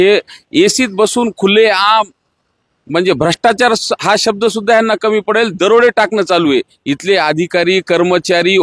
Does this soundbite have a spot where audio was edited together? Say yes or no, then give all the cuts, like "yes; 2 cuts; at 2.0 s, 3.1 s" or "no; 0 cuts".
no; 0 cuts